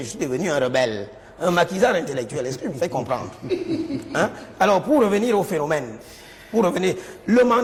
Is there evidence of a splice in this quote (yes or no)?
no